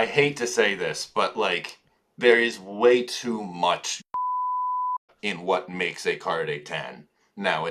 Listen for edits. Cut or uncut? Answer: uncut